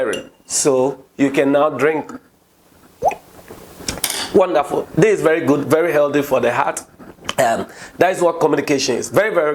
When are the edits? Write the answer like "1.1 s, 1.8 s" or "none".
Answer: none